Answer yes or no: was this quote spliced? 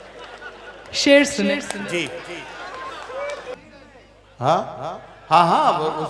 yes